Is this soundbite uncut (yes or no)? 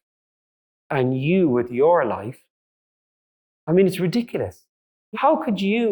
no